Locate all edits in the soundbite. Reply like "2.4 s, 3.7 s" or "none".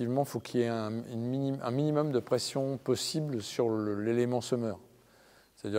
none